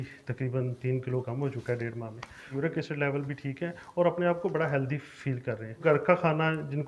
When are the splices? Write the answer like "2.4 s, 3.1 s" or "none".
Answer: 2.5 s, 5.8 s